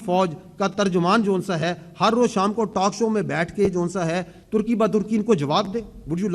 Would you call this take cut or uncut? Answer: uncut